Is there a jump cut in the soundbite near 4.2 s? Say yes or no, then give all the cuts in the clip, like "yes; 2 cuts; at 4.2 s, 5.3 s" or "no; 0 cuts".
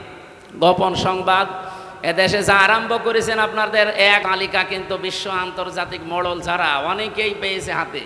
yes; 1 cut; at 4.2 s